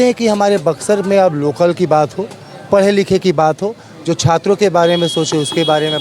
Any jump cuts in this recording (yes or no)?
no